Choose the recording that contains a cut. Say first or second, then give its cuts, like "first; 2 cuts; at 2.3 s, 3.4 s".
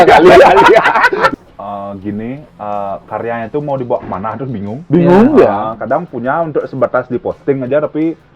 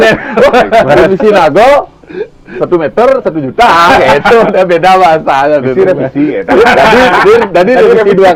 first; 1 cut; at 1.3 s